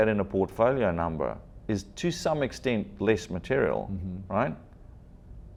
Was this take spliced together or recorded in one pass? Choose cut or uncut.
uncut